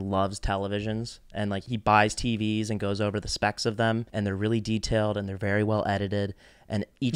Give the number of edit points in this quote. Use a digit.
2